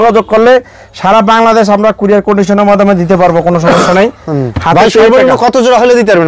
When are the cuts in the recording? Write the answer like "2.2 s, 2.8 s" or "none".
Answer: none